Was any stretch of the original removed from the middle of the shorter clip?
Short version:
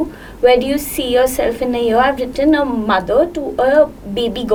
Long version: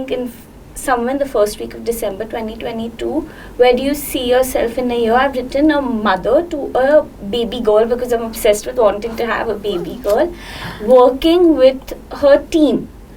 no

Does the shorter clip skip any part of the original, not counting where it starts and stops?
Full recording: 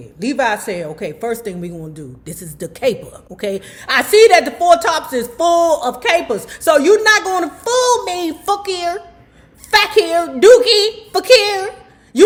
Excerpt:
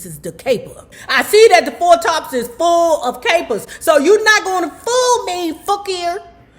yes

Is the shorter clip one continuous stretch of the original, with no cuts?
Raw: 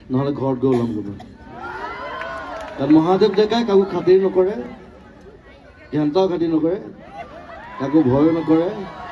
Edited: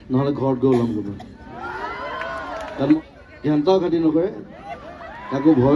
no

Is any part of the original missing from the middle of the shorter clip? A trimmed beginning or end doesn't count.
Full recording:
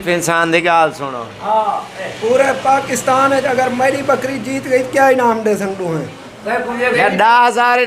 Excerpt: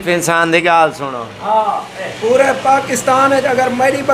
no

